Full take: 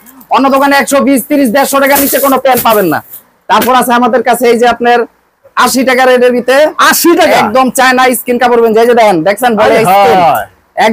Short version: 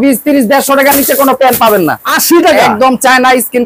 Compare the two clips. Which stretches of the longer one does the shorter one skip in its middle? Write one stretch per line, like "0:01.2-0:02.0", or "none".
0:03.2-0:06.9